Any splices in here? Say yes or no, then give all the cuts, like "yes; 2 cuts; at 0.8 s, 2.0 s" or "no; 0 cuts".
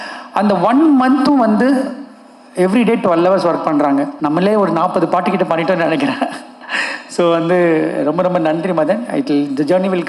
yes; 1 cut; at 4.1 s